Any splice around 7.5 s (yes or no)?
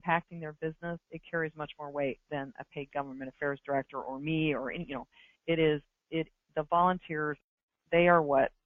yes